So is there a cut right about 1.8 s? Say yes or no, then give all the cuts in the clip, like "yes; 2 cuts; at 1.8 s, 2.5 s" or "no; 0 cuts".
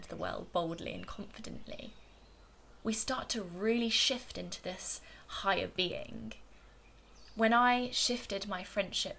no; 0 cuts